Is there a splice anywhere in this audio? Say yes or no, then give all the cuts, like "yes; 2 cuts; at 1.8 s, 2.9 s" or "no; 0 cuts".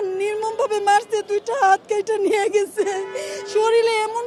no; 0 cuts